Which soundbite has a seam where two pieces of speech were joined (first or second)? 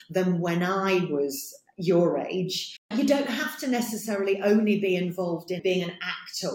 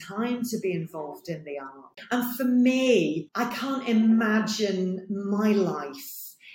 first